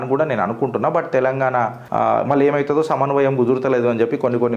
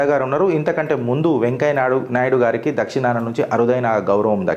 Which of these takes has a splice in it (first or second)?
first